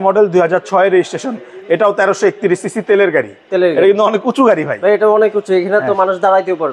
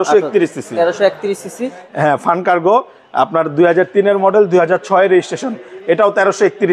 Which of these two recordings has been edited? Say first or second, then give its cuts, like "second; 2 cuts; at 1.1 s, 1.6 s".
second; 1 cut; at 1.8 s